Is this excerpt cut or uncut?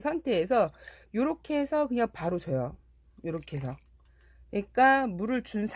uncut